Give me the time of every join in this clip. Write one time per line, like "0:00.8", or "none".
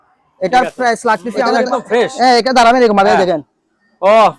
0:01.5

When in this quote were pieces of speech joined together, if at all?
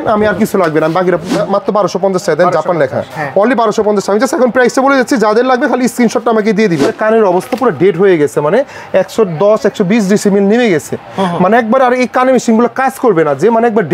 0:01.3
0:06.9

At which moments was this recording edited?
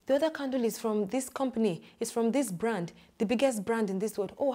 none

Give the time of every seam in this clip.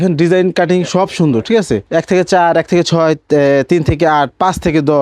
0:01.9

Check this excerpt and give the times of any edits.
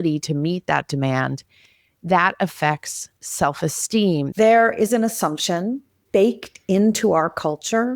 0:04.3
0:06.0

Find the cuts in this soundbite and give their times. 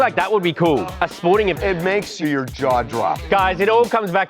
0:01.7
0:03.2

